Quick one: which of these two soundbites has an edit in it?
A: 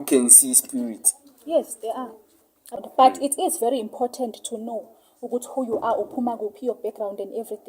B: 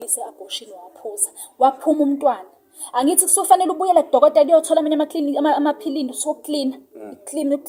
A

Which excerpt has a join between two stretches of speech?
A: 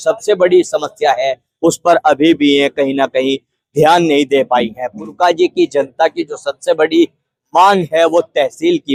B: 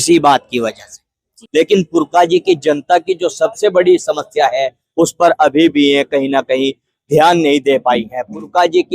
B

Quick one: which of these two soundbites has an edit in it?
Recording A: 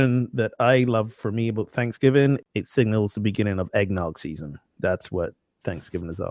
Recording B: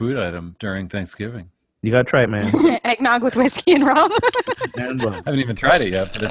A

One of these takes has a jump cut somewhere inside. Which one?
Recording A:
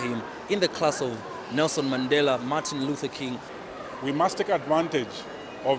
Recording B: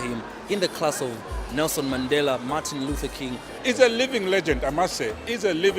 B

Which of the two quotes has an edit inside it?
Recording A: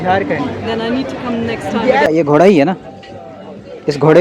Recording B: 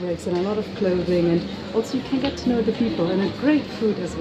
A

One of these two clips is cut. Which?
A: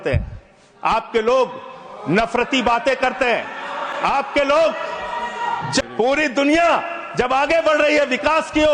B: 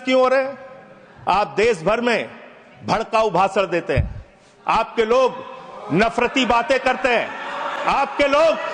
A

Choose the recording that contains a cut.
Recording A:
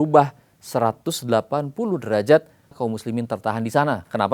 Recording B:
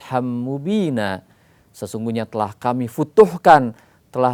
A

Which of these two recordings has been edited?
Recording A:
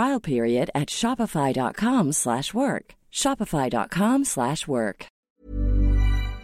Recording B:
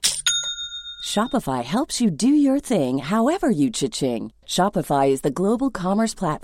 A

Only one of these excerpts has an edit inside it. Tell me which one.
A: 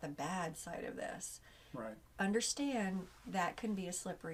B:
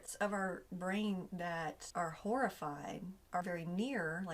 B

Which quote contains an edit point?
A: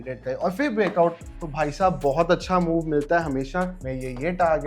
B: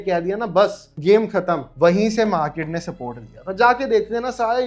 A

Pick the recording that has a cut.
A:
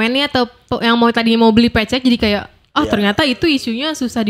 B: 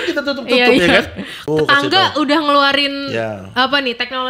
B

